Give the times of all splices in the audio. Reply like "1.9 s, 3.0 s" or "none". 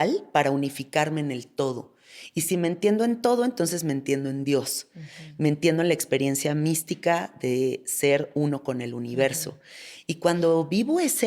none